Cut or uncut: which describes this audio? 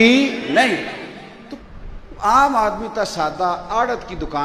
cut